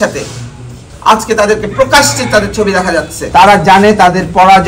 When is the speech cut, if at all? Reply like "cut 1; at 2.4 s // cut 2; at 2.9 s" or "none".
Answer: cut 1; at 3.2 s